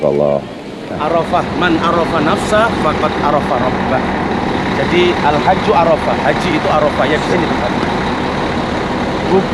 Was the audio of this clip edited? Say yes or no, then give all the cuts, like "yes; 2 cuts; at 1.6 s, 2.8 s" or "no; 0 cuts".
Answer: yes; 1 cut; at 1.0 s